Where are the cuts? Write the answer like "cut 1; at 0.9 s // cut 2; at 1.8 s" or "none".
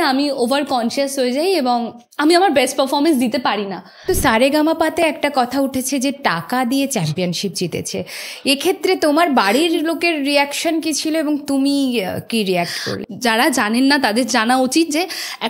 cut 1; at 4.1 s // cut 2; at 13.0 s

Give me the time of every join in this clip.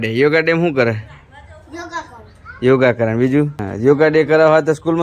cut 1; at 3.7 s

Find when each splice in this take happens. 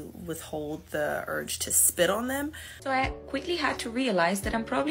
cut 1; at 2.7 s

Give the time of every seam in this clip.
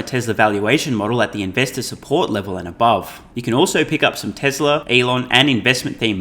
cut 1; at 3.2 s // cut 2; at 4.8 s

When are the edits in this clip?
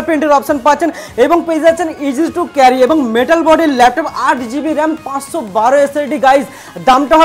none

